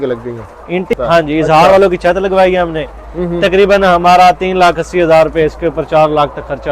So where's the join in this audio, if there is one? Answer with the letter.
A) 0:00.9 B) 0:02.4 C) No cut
A